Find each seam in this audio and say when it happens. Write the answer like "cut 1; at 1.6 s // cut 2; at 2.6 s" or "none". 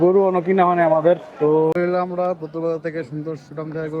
cut 1; at 1.8 s